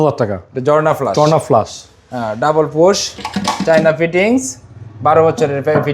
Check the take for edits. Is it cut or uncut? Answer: uncut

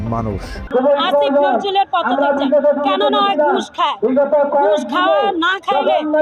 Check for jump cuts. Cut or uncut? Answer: uncut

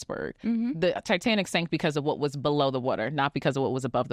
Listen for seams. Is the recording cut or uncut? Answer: uncut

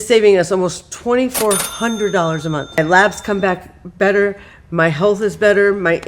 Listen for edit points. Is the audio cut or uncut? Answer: cut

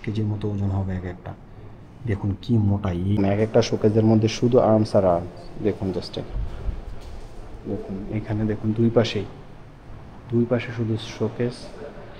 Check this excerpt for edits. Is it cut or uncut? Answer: cut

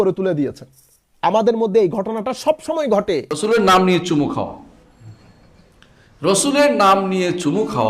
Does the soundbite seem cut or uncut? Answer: cut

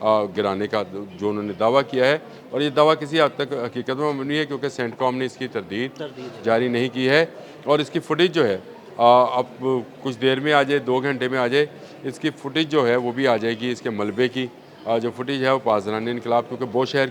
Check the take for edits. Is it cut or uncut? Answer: uncut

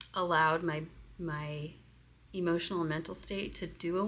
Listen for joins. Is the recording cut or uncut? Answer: uncut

